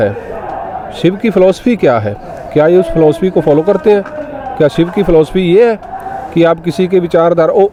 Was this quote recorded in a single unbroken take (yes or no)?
yes